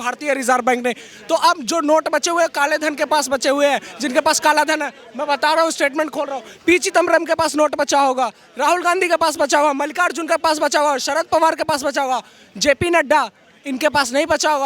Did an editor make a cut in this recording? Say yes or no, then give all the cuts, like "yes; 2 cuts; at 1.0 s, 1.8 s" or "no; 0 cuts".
no; 0 cuts